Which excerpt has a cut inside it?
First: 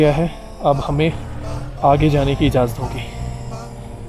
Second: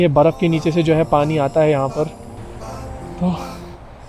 second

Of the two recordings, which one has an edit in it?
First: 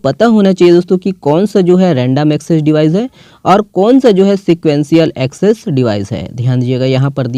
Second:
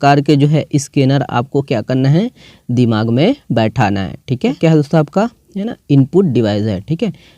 second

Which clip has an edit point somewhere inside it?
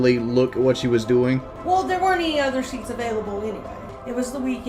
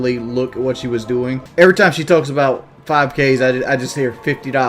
second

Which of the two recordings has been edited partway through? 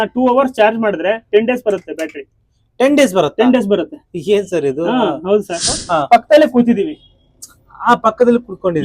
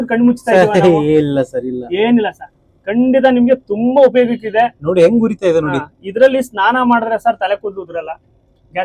first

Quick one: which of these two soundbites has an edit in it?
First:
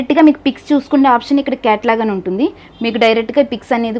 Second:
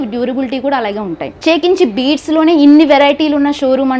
second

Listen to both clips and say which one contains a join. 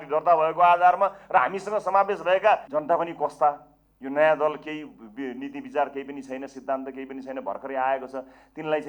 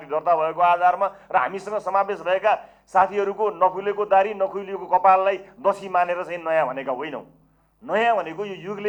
first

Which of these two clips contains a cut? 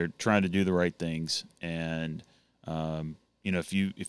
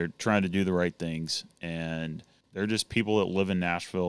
second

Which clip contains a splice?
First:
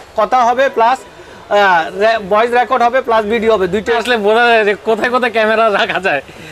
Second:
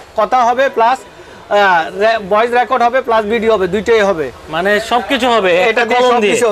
first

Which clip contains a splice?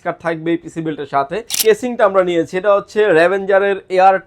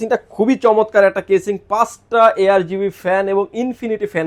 first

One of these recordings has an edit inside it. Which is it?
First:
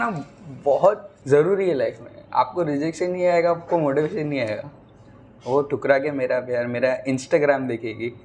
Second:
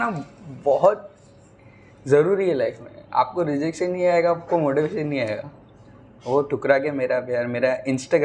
first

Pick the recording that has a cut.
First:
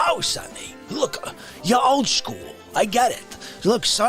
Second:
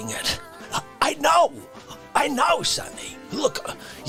first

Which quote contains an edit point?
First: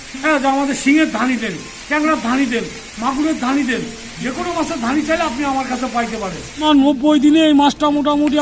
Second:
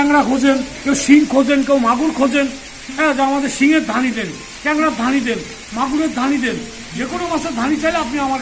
first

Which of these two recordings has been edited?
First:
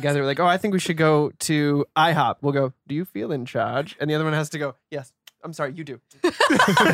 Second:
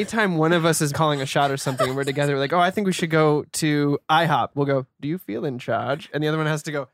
second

